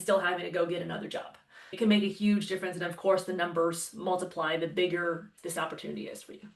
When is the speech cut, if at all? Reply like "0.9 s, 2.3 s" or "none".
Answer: 1.7 s, 5.3 s